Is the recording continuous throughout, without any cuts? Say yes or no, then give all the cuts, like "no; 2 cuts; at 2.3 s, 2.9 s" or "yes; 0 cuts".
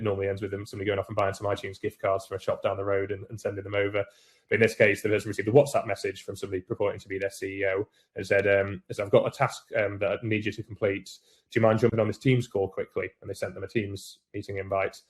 yes; 0 cuts